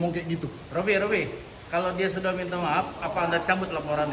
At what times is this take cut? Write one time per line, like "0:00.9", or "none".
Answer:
none